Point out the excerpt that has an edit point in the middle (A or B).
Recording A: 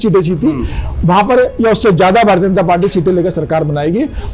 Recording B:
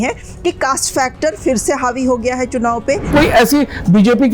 B